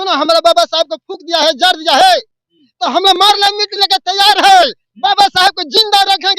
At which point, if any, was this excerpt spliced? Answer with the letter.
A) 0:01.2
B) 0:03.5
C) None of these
C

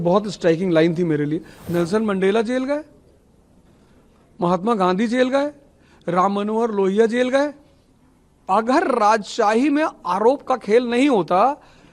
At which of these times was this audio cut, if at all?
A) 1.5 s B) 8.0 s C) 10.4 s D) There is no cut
A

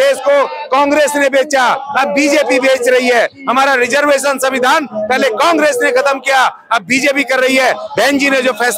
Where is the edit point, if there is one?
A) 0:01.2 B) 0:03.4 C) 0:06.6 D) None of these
D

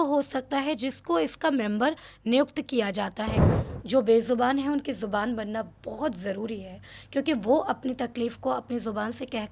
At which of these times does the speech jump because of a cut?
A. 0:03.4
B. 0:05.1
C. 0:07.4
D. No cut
A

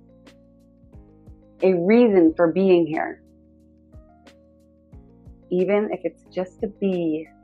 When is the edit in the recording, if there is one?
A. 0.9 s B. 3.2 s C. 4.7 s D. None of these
A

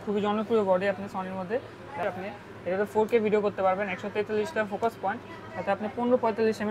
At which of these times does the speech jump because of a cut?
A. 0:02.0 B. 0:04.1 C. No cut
A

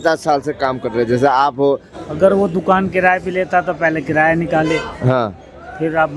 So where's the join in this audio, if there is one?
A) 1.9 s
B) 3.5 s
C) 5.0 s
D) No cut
A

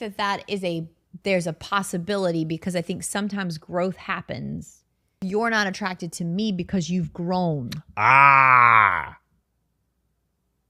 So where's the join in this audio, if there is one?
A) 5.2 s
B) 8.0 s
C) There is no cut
A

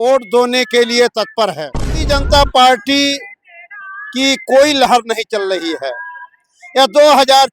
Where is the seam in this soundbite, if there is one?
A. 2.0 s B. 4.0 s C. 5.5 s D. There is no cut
A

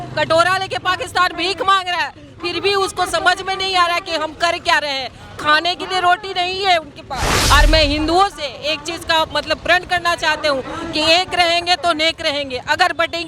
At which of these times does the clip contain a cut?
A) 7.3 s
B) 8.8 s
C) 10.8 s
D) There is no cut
A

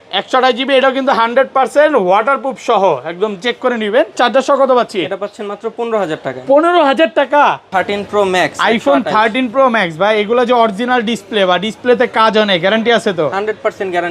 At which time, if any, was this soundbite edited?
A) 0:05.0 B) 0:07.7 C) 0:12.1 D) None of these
B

